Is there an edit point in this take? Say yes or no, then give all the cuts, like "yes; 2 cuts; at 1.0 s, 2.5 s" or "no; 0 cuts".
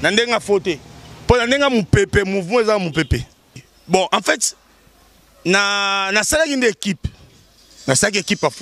yes; 1 cut; at 3.7 s